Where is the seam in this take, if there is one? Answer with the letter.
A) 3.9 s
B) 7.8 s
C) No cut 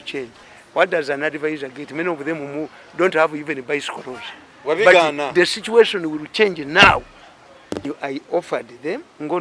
B